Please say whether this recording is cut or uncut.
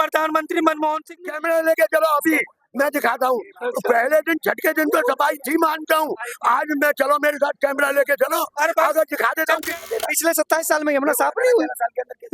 cut